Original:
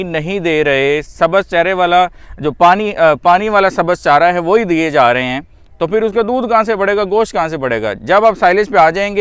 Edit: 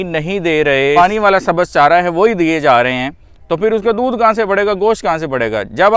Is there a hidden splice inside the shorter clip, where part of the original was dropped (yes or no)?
yes